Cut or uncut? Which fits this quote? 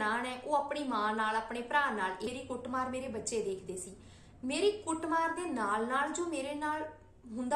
cut